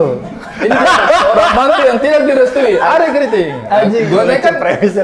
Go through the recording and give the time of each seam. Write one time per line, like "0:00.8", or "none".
none

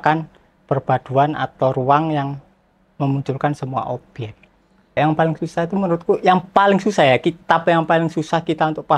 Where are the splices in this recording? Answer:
0:04.9

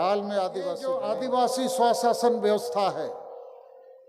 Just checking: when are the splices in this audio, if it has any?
0:00.9

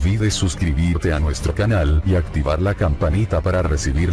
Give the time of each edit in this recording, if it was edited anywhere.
none

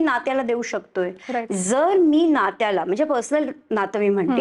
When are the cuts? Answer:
none

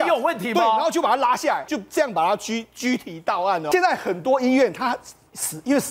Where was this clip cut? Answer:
0:01.7
0:03.6

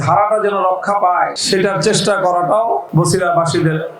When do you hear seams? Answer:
0:01.4
0:02.9

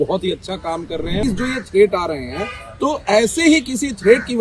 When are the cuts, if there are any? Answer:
0:01.2

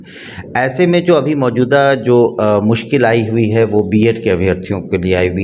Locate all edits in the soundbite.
none

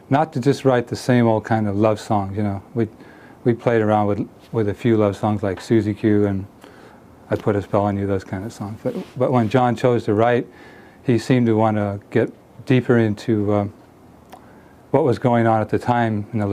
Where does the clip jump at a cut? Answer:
0:08.3

